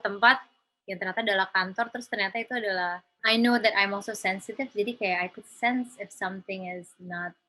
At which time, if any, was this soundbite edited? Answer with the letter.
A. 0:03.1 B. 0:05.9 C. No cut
A